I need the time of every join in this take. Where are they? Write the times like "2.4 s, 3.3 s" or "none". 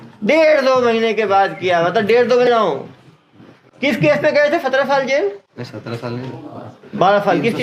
2.5 s